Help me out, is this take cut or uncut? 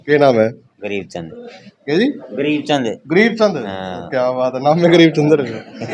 uncut